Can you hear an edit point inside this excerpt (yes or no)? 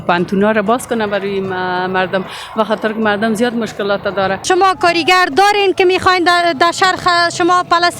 yes